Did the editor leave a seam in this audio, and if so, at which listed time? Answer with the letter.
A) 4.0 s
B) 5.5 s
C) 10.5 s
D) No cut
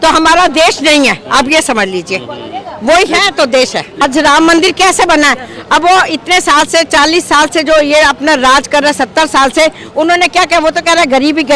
A